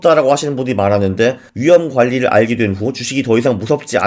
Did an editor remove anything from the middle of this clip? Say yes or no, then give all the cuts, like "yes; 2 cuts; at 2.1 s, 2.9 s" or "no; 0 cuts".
yes; 1 cut; at 1.5 s